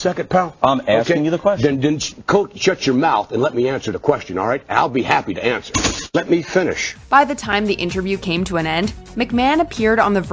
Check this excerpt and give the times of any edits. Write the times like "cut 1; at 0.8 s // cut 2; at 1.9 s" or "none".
none